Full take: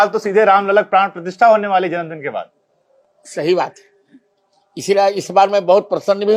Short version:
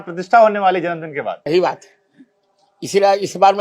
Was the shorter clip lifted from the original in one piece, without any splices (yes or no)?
no